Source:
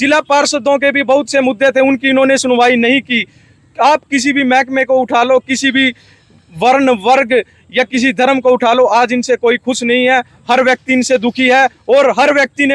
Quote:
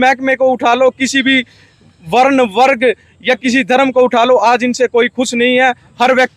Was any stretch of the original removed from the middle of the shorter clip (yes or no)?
no